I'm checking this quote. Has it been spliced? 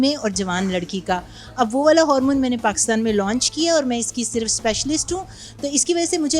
no; 0 cuts

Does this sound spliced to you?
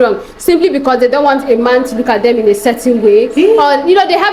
no; 0 cuts

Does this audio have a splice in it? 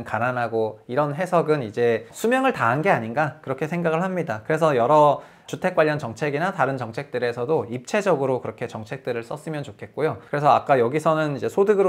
yes; 3 cuts; at 2.1 s, 5.5 s, 10.2 s

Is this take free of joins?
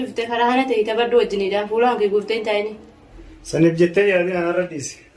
yes; 0 cuts

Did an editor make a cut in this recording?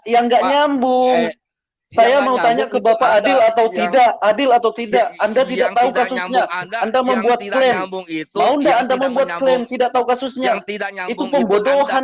no; 0 cuts

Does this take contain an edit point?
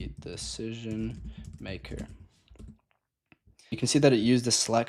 yes; 1 cut; at 3.7 s

